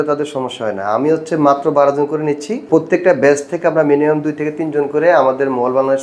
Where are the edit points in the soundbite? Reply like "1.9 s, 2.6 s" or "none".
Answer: 2.6 s